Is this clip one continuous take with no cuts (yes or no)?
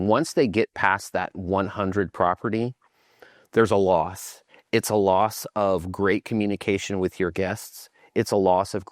yes